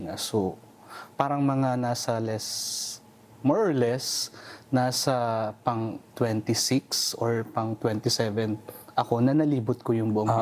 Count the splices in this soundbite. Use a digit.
0